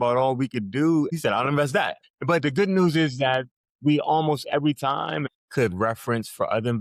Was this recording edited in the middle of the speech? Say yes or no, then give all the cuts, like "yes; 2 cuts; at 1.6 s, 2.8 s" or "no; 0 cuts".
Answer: yes; 3 cuts; at 1.1 s, 2.1 s, 5.3 s